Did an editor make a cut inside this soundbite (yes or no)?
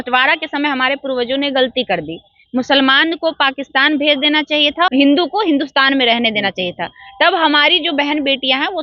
no